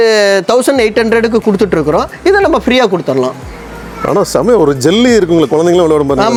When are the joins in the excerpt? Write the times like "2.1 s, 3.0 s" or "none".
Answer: none